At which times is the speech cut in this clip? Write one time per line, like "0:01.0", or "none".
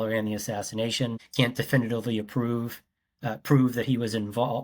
0:01.2